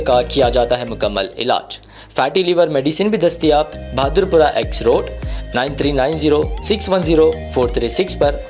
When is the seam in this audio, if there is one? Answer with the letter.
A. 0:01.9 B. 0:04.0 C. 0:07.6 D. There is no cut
D